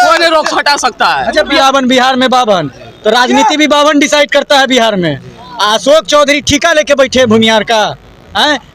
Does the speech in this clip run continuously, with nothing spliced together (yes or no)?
no